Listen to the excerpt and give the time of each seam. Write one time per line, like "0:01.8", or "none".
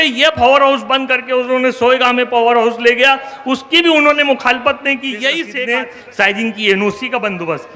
0:05.5